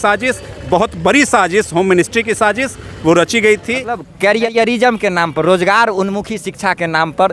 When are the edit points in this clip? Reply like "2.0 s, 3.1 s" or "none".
4.1 s